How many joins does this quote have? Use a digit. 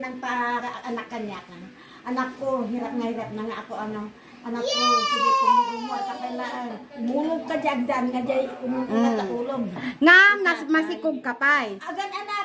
0